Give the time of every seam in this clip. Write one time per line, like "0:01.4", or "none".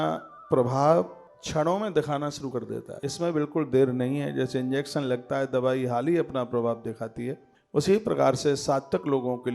none